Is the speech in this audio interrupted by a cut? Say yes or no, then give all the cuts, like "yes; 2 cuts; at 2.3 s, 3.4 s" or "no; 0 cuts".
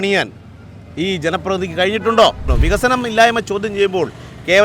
yes; 1 cut; at 2.5 s